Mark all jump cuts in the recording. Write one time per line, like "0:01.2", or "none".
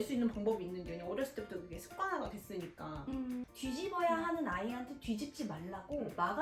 0:03.4